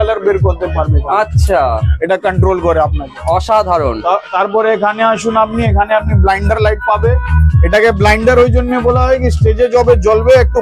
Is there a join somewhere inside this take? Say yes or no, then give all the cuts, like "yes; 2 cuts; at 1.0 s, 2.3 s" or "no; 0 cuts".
no; 0 cuts